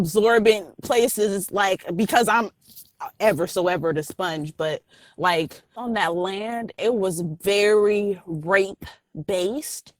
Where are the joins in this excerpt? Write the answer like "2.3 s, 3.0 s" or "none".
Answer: 5.8 s, 6.8 s